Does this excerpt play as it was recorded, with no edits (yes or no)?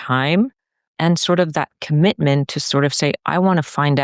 no